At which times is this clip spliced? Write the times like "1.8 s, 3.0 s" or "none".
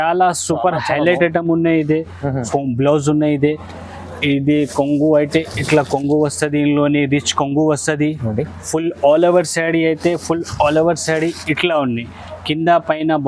2.4 s